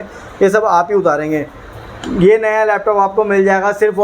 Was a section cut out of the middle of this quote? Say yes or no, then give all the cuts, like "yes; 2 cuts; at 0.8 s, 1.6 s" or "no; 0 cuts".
no; 0 cuts